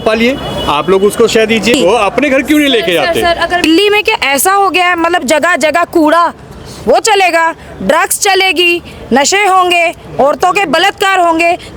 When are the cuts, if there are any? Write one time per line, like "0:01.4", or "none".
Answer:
0:01.7
0:03.6